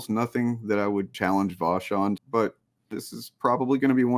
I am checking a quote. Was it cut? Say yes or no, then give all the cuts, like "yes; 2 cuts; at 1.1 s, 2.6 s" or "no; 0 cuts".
yes; 2 cuts; at 1.1 s, 2.2 s